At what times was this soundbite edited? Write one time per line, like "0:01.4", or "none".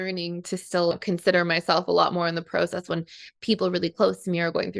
0:00.9